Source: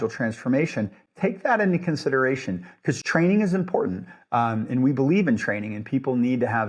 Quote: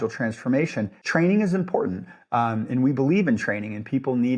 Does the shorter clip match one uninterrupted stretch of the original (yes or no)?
no